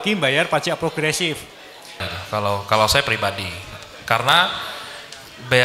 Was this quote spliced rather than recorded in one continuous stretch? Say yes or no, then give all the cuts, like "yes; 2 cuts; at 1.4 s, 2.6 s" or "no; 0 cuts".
yes; 1 cut; at 2.1 s